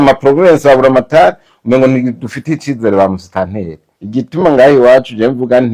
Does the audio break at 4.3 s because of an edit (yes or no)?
yes